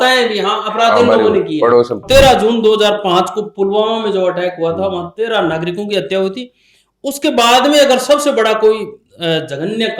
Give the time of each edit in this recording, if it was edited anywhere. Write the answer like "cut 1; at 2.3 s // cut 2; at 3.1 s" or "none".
cut 1; at 2.0 s